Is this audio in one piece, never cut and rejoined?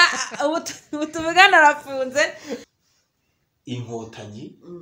no; 1 cut; at 2.7 s

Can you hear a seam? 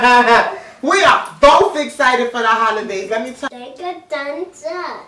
yes; 1 cut; at 3.4 s

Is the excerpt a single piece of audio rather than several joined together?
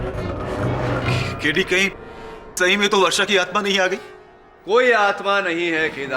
yes; 0 cuts

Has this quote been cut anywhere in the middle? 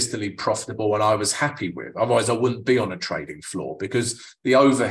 no; 0 cuts

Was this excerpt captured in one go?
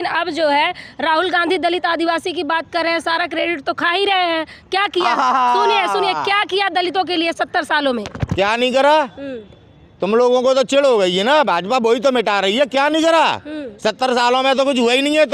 yes; 0 cuts

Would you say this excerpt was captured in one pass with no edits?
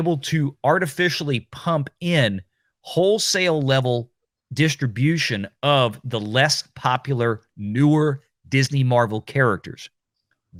yes; 0 cuts

